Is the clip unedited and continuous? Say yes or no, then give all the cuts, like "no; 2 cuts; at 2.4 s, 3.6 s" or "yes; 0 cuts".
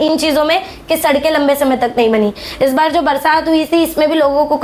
yes; 0 cuts